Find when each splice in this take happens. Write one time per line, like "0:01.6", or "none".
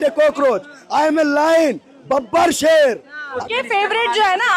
0:03.4